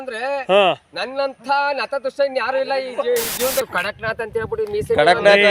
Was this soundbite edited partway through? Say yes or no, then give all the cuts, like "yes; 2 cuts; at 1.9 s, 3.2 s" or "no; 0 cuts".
yes; 1 cut; at 3.7 s